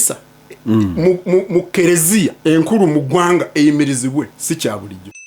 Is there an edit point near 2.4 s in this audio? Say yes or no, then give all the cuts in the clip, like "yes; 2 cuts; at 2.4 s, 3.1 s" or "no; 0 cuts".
yes; 2 cuts; at 2.4 s, 4.4 s